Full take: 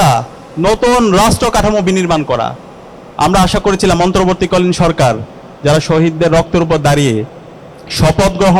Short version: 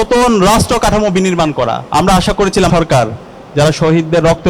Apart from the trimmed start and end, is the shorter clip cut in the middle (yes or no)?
yes